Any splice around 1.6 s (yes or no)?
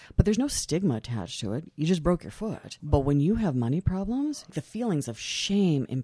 no